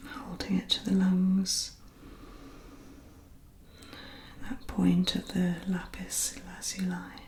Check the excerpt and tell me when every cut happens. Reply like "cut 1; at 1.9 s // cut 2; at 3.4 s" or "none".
none